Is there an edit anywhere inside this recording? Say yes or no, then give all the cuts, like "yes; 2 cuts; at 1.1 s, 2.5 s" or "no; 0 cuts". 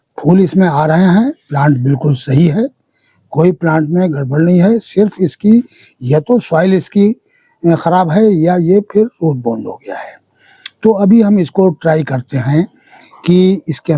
no; 0 cuts